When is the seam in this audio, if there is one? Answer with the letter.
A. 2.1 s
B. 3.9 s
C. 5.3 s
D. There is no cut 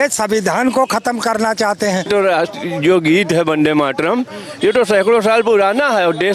A